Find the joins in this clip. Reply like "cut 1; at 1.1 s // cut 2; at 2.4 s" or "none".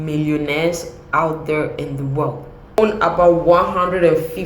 cut 1; at 2.8 s